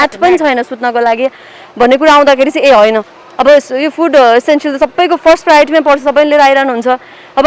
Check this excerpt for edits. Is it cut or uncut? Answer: uncut